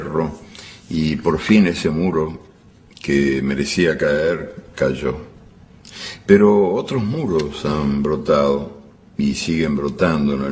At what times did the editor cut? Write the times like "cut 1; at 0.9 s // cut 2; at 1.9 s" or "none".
cut 1; at 7.5 s